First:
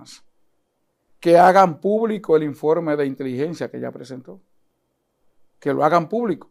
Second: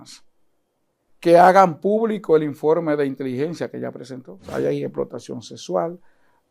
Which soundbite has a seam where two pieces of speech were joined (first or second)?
second